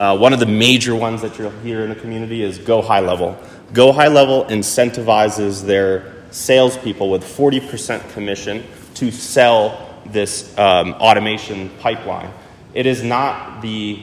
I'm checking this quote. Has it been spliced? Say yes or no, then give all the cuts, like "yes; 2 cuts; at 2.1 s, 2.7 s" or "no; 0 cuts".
no; 0 cuts